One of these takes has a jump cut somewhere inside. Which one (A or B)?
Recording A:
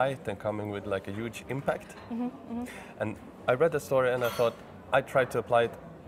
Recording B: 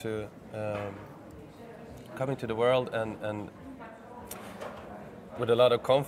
B